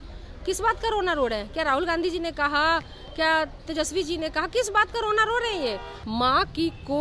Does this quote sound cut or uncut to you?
cut